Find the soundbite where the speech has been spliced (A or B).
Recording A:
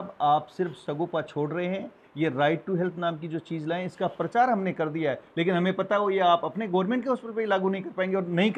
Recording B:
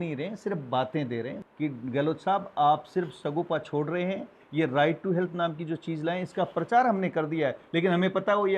B